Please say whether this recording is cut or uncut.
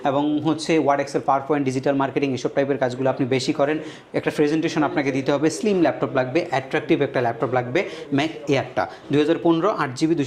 uncut